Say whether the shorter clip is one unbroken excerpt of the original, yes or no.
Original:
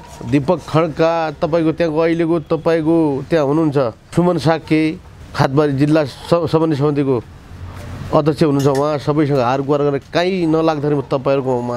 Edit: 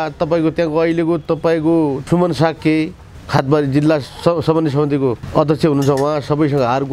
no